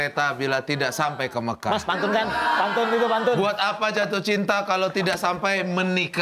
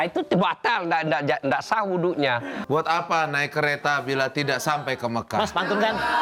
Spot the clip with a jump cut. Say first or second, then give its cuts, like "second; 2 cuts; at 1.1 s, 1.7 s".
second; 1 cut; at 2.5 s